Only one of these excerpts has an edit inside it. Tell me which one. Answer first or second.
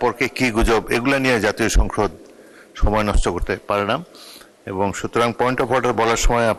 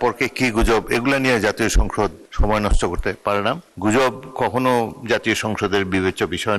second